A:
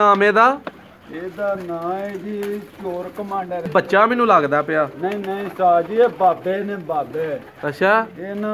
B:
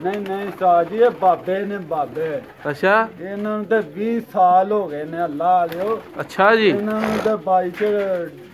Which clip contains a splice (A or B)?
A